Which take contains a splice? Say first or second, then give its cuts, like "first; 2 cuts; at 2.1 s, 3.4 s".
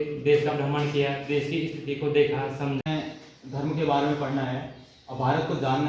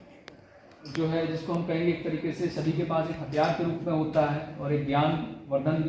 first; 1 cut; at 2.8 s